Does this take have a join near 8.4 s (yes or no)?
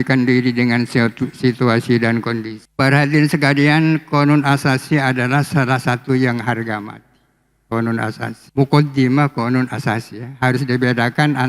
yes